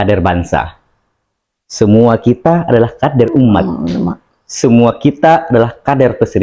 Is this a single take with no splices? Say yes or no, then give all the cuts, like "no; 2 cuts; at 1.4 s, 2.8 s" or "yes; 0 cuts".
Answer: yes; 0 cuts